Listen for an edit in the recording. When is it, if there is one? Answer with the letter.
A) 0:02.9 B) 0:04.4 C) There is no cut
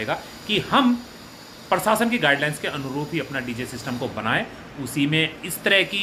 C